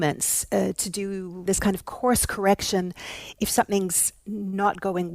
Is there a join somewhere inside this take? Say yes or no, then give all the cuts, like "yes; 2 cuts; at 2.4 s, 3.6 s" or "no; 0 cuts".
yes; 1 cut; at 1.4 s